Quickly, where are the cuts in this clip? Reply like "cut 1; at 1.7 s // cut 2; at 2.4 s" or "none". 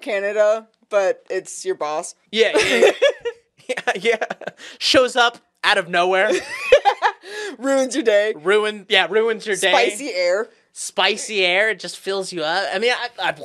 cut 1; at 2.2 s